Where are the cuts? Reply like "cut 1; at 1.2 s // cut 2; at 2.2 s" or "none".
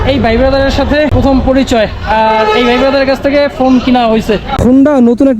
cut 1; at 1.1 s // cut 2; at 4.5 s

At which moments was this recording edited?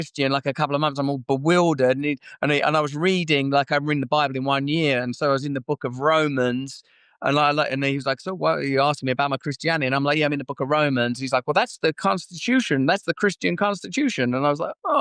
none

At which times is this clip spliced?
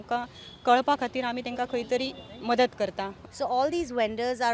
cut 1; at 3.2 s

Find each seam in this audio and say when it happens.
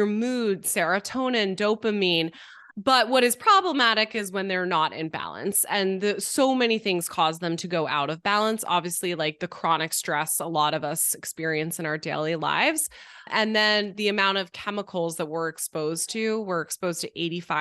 none

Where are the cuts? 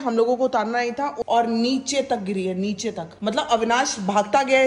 cut 1; at 1.2 s

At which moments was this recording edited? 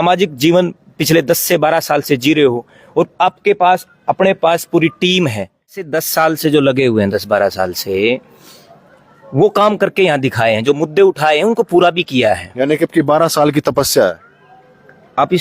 cut 1; at 5.9 s

